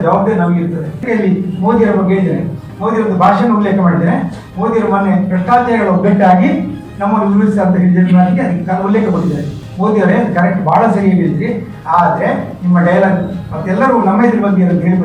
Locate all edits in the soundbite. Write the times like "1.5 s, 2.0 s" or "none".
1.0 s, 9.5 s